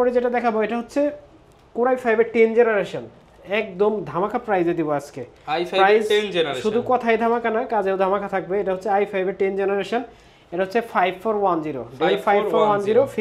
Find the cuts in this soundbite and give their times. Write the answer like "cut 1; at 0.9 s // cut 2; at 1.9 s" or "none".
none